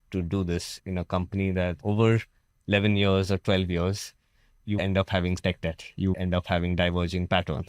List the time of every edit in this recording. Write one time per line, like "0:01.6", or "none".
0:04.8
0:06.2